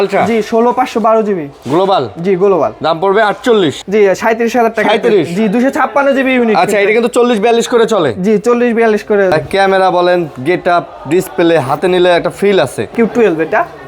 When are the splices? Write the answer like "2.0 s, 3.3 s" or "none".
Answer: 3.8 s, 9.3 s, 12.9 s